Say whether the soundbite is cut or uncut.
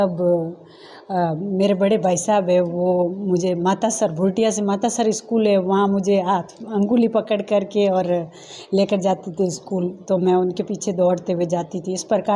uncut